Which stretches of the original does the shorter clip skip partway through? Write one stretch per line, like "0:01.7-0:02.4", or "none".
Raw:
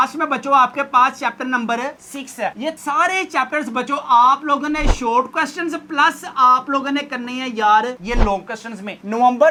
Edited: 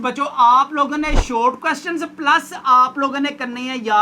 none